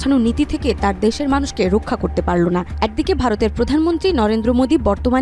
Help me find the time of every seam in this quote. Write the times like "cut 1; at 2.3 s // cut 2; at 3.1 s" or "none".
none